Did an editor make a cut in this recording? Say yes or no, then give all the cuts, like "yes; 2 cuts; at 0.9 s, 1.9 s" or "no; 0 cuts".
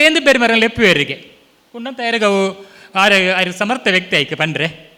no; 0 cuts